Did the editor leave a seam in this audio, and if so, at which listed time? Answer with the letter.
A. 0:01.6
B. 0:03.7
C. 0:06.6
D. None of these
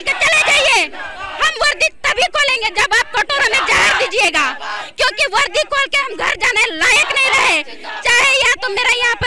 D